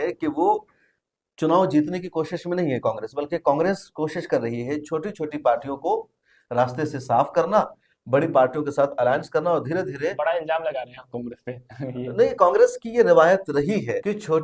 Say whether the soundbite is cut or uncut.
uncut